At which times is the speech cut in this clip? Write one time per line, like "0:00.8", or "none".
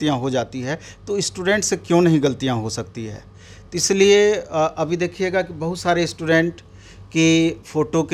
none